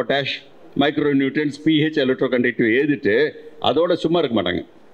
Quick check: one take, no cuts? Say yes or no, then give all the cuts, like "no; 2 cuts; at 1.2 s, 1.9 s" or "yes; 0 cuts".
yes; 0 cuts